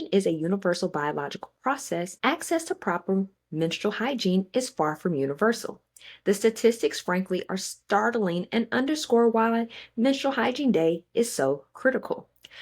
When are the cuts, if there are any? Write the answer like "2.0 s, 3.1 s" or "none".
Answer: 2.1 s

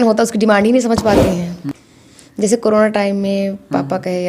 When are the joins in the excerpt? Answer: 1.7 s

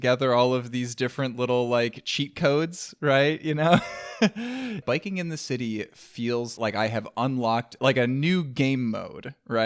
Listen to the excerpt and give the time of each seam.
4.8 s, 6.5 s, 7.7 s

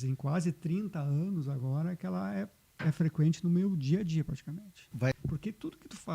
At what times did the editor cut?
5.2 s

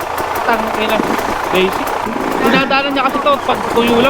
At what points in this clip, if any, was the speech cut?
2.0 s

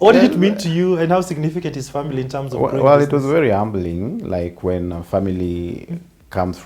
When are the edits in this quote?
none

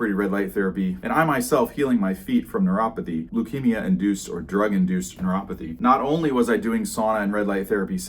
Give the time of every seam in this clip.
1.0 s, 3.3 s, 5.6 s

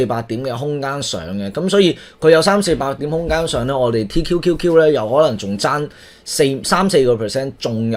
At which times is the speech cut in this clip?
none

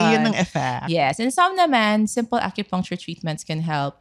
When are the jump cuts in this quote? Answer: none

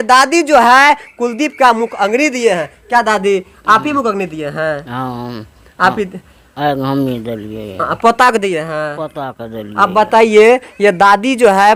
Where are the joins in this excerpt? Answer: none

